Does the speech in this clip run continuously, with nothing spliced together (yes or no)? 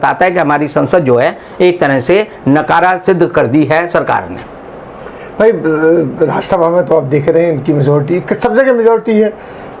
yes